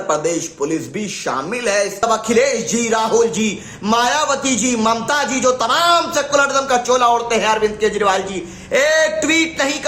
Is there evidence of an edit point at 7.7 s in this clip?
no; 1 cut; at 2.0 s

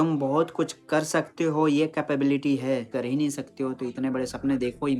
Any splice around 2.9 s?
yes; 1 cut; at 2.9 s

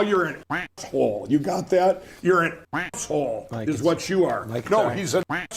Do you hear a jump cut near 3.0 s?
no; 1 cut; at 4.6 s

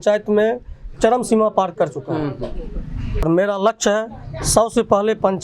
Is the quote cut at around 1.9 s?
no; 1 cut; at 3.2 s

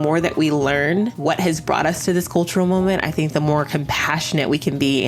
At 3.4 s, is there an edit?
no; 1 cut; at 1.2 s

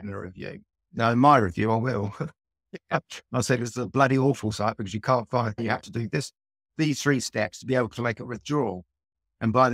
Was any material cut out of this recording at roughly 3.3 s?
no; 1 cut; at 5.6 s

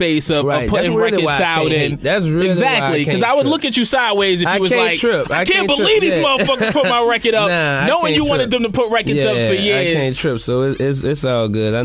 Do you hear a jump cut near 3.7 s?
no; 0 cuts

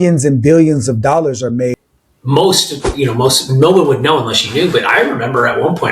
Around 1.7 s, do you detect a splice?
yes; 1 cut; at 1.7 s

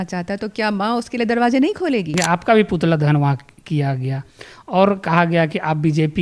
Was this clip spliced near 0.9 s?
no; 1 cut; at 2.2 s

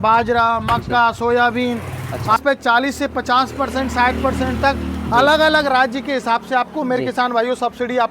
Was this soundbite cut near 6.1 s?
no; 1 cut; at 2.4 s

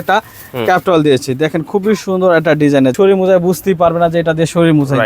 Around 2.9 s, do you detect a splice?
yes; 1 cut; at 2.9 s

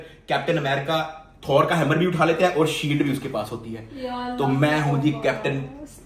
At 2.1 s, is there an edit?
no; 0 cuts

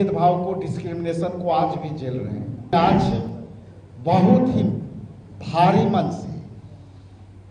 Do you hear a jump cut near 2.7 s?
yes; 1 cut; at 2.7 s

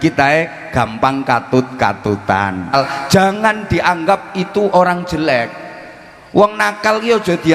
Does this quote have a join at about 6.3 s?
no; 1 cut; at 2.7 s

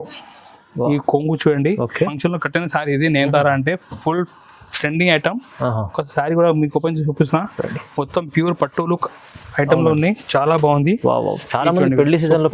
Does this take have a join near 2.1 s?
yes; 1 cut; at 2.1 s

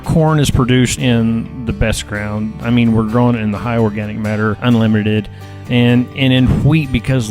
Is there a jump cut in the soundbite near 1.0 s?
yes; 2 cuts; at 1.0 s, 4.6 s

